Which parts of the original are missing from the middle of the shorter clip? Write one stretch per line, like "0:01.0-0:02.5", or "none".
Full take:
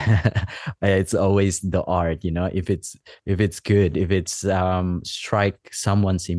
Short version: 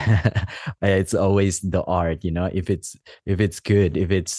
none